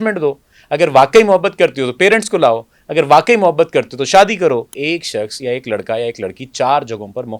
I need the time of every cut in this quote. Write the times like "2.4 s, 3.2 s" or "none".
4.7 s